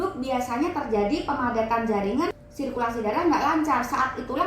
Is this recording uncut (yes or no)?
no